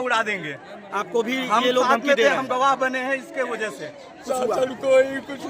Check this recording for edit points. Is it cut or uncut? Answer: cut